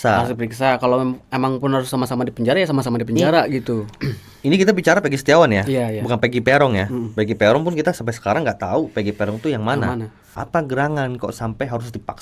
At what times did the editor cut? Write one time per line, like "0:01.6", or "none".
0:03.9
0:10.4